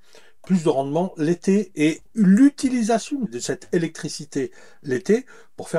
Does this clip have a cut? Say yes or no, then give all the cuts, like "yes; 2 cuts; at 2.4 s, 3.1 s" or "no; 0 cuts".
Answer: yes; 1 cut; at 3.3 s